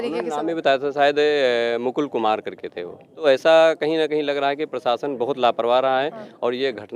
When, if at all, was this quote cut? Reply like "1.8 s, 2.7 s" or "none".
3.2 s